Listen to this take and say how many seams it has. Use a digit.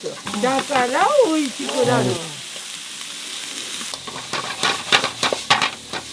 1